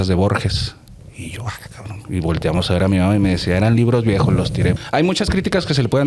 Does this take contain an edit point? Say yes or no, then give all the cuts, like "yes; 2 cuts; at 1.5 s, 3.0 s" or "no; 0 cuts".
yes; 1 cut; at 4.8 s